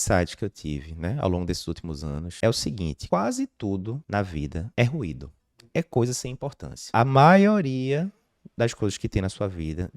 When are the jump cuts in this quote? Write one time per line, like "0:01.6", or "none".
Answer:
0:02.3
0:03.0
0:04.4
0:06.9